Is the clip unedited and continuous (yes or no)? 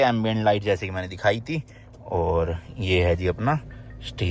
yes